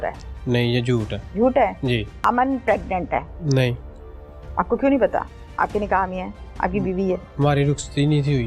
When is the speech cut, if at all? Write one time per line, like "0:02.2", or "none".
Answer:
0:01.2
0:02.1
0:03.3